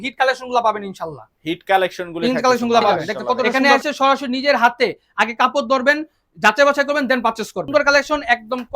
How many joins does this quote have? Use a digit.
2